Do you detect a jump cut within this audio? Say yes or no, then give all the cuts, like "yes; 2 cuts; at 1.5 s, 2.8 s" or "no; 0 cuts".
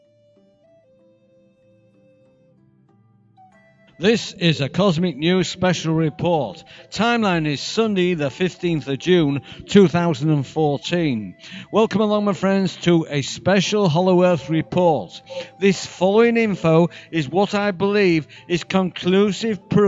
no; 0 cuts